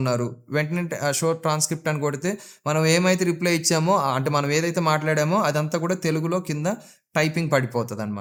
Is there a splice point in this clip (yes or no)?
no